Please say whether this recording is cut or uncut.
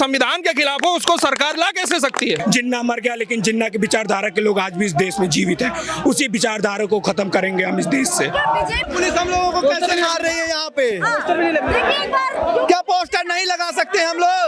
cut